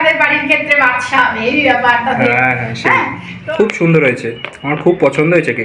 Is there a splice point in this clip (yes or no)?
yes